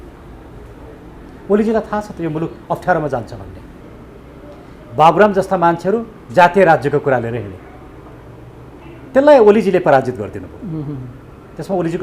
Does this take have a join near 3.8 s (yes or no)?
yes